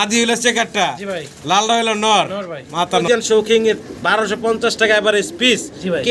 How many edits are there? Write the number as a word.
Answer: one